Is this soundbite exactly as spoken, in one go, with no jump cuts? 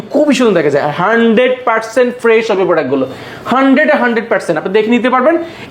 yes; 0 cuts

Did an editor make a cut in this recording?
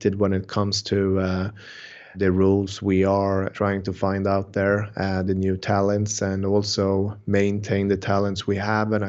yes; 2 cuts; at 2.2 s, 3.5 s

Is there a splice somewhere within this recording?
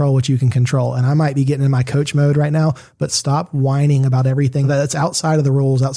yes; 1 cut; at 4.6 s

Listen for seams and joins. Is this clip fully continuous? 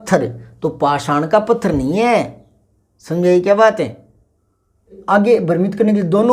no; 1 cut; at 5.0 s

